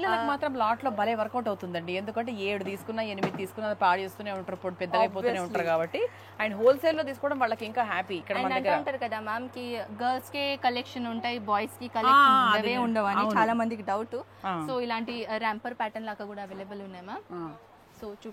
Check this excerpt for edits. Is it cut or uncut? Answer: uncut